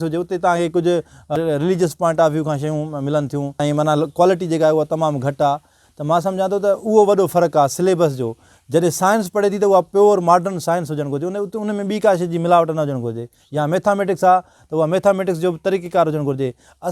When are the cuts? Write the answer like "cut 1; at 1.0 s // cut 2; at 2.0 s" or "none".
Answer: cut 1; at 1.3 s // cut 2; at 3.6 s